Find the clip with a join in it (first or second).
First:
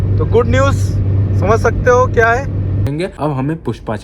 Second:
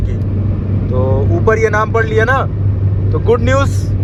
first